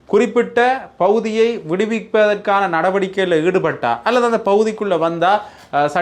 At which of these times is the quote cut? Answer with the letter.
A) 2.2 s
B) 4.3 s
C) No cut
C